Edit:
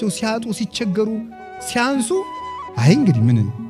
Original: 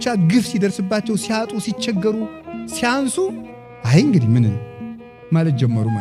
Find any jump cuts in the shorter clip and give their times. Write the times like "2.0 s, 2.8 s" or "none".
none